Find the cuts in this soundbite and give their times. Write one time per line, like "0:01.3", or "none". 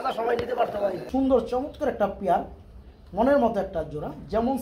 0:01.0